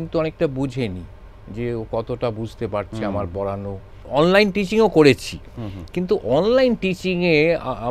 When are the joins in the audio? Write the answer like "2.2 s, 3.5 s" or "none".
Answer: 4.0 s